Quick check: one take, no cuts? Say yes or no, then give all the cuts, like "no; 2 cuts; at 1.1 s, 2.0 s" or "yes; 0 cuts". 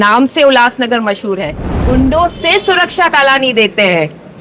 no; 1 cut; at 1.8 s